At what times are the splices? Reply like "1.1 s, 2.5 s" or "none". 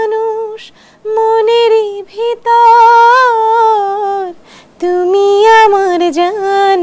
none